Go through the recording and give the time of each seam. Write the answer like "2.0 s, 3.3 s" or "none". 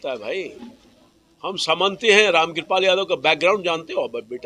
none

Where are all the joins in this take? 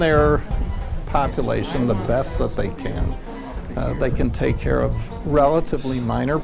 none

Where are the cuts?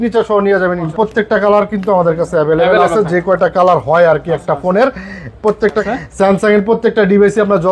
0.9 s, 5.8 s

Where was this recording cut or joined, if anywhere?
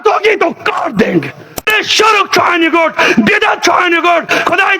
1.7 s

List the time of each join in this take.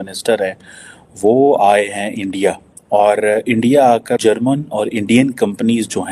4.2 s

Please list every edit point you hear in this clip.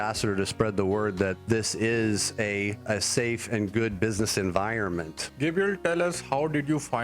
1.4 s, 2.8 s, 5.2 s

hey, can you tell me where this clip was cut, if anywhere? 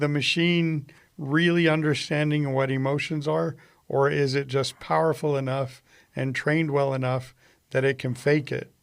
none

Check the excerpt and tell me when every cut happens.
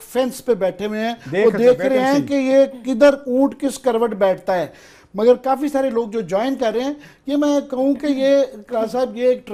none

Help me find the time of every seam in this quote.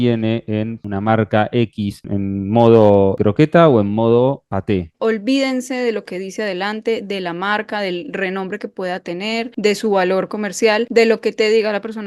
0.8 s, 2.0 s, 3.2 s, 4.9 s, 9.5 s, 10.9 s

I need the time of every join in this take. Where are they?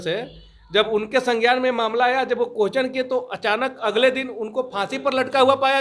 none

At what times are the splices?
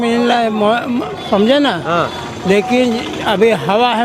none

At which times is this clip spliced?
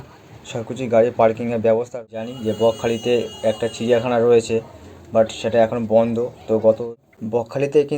2.0 s, 7.0 s

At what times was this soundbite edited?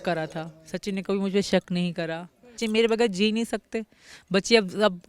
2.6 s

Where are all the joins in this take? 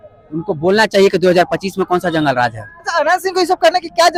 none

